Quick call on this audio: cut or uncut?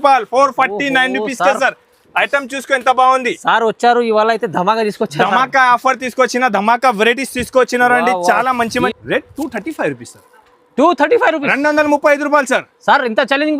cut